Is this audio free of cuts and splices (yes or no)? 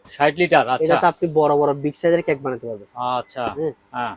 yes